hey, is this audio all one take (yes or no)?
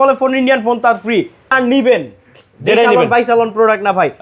no